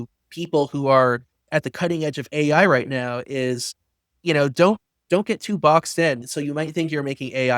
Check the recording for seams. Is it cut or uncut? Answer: cut